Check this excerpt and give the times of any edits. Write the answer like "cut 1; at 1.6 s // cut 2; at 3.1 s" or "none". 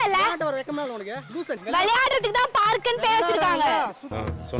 cut 1; at 1.6 s